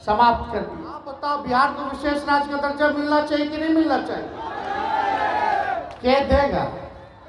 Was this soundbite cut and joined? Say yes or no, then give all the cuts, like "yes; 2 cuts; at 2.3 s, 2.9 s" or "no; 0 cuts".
yes; 1 cut; at 1.1 s